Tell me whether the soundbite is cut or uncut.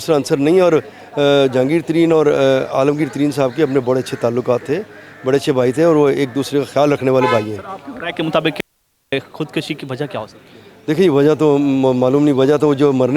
uncut